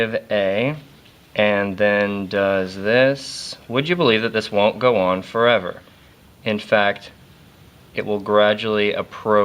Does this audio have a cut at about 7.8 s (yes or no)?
no